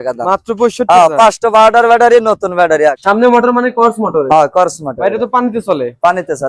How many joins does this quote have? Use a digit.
1